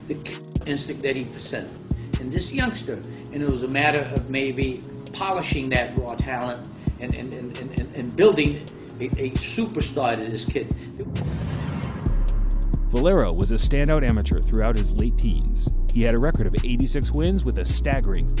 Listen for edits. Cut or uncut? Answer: cut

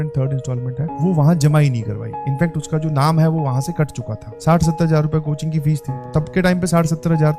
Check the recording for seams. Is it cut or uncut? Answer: cut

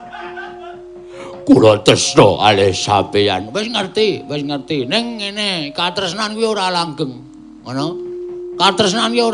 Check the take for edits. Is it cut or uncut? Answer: uncut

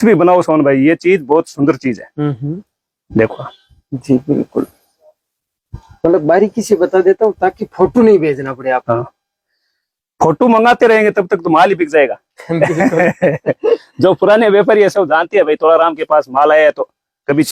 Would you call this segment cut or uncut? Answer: uncut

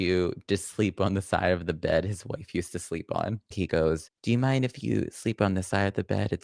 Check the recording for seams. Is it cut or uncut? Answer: cut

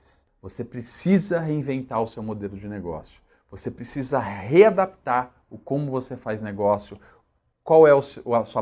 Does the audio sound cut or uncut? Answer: uncut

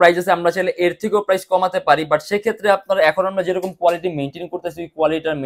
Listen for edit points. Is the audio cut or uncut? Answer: uncut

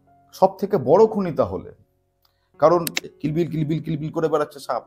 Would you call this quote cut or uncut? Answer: cut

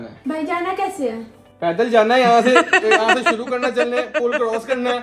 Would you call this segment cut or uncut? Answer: uncut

